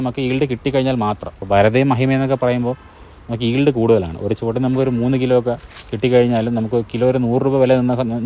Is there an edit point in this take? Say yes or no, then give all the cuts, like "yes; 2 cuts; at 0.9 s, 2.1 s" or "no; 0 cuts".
yes; 1 cut; at 1.3 s